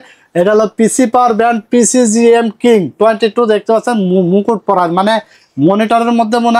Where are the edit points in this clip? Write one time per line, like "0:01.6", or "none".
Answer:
none